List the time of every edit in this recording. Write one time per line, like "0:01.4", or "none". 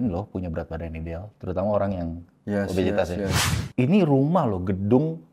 0:03.4

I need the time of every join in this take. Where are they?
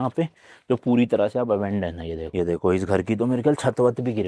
0:02.3

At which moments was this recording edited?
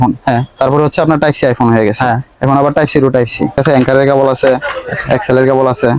0:03.6

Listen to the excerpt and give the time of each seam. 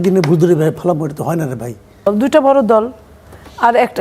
0:02.0

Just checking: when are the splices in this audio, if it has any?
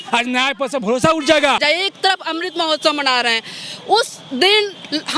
0:01.6

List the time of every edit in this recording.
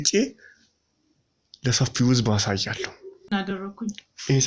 0:03.3

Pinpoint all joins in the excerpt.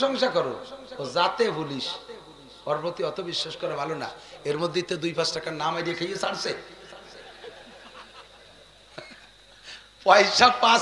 none

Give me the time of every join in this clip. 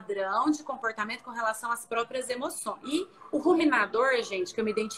0:02.8

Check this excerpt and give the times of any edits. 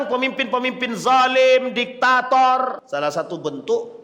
0:02.8

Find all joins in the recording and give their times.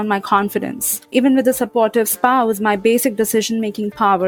0:01.1

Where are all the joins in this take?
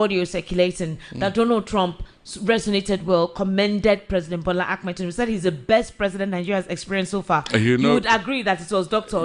none

